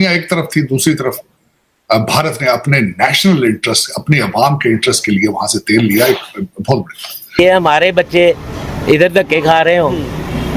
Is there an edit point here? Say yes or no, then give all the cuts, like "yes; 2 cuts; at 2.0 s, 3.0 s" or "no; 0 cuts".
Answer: yes; 1 cut; at 7.4 s